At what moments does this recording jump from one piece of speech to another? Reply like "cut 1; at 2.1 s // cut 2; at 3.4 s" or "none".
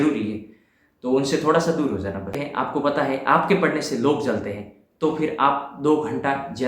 cut 1; at 2.4 s